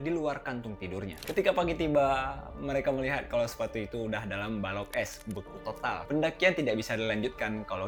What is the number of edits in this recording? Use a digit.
0